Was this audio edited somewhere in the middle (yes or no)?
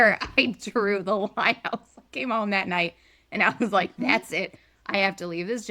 no